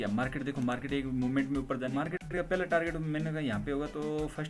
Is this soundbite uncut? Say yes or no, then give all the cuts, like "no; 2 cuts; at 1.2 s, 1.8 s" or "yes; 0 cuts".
no; 1 cut; at 2.3 s